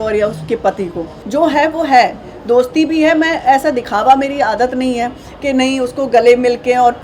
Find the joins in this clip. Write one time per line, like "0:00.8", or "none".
0:01.1